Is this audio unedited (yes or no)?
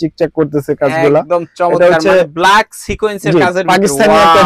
yes